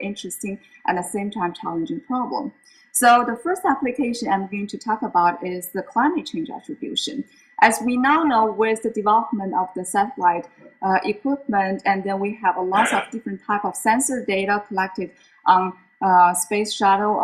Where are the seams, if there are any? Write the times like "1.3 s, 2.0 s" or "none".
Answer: 4.3 s